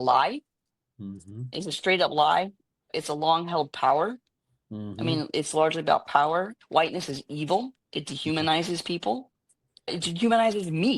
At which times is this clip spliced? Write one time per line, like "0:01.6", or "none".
0:02.9
0:06.6
0:09.9